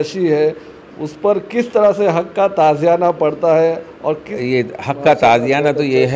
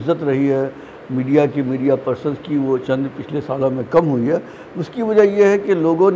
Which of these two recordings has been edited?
first; 1 cut; at 4.3 s

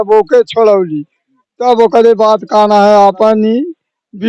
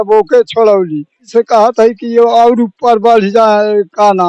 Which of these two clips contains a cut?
second; 1 cut; at 1.2 s

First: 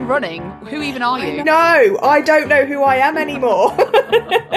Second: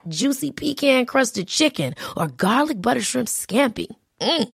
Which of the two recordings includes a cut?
first; 1 cut; at 1.4 s

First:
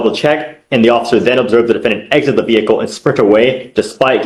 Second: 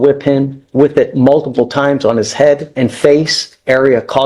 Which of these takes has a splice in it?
second; 1 cut; at 2.7 s

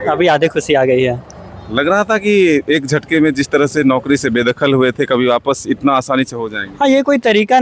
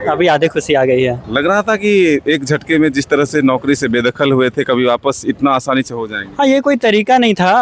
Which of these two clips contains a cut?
second; 1 cut; at 1.2 s

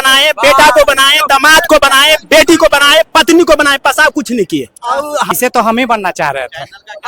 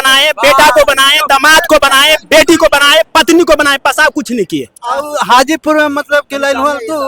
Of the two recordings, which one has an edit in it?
first; 1 cut; at 5.3 s

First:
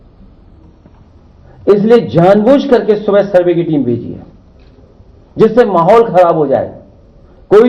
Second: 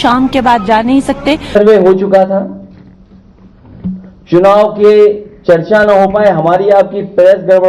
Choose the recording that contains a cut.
second; 1 cut; at 1.6 s

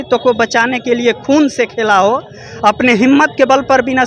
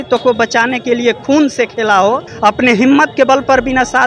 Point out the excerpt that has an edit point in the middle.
second; 1 cut; at 2.3 s

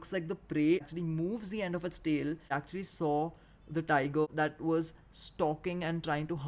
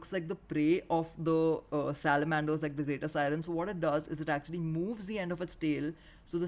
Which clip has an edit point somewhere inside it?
first; 3 cuts; at 0.9 s, 2.5 s, 4.3 s

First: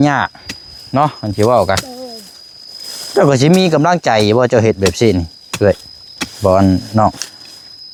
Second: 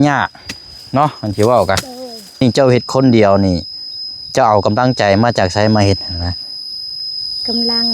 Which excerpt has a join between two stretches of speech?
second; 1 cut; at 2.4 s

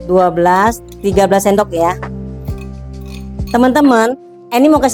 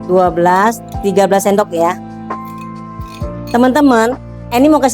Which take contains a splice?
second; 2 cuts; at 2.0 s, 3.5 s

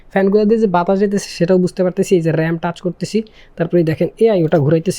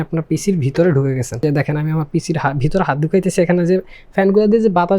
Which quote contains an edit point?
second; 1 cut; at 1.4 s

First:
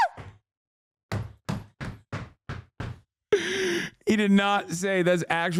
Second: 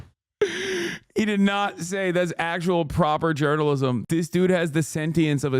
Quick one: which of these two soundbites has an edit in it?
second; 1 cut; at 4.0 s

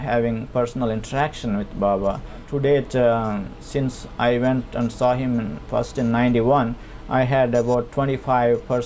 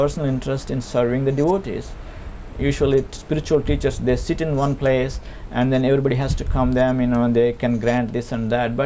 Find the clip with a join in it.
first; 1 cut; at 2.4 s

